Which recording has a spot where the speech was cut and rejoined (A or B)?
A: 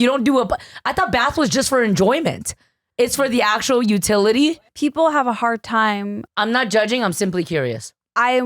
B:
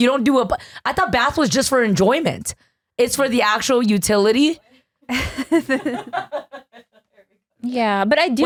A